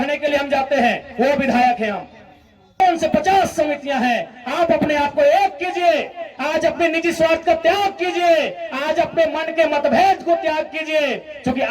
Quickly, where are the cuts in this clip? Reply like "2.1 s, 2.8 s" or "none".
2.8 s